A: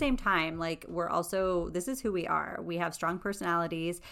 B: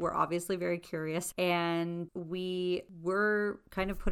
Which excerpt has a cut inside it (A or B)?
B